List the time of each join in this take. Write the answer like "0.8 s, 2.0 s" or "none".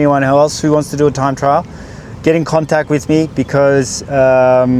none